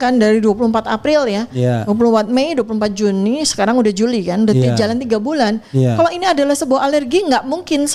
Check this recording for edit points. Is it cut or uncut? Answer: uncut